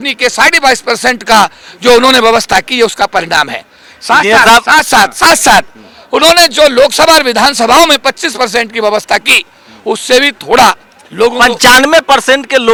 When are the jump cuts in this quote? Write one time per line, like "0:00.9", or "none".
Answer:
none